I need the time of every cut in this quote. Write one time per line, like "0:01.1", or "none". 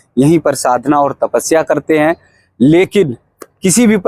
none